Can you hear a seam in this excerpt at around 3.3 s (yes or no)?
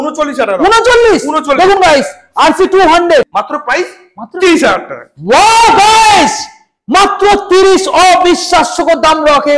yes